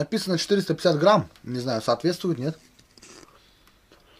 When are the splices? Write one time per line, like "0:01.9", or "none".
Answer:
none

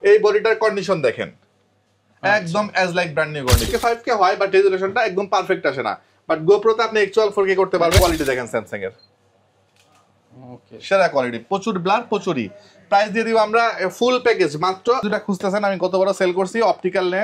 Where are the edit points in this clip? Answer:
0:03.7
0:08.0
0:15.0

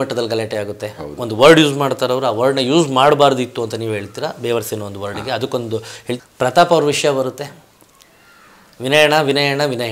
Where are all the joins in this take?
0:06.2

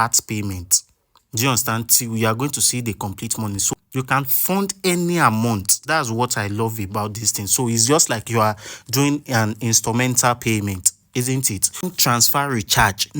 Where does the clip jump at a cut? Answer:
0:03.7
0:11.9

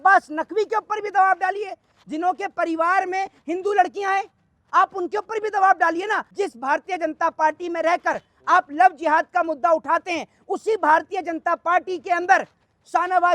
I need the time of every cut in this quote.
0:06.3

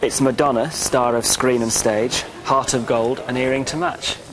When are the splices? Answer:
none

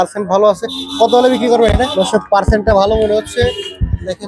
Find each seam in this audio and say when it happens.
0:01.9

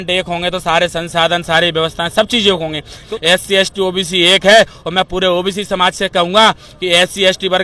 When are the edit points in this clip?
0:03.0

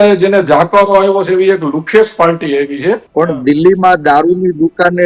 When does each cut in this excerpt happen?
0:03.1

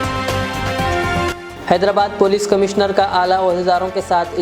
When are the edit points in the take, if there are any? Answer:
0:01.3

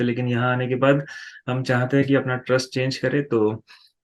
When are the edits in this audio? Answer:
none

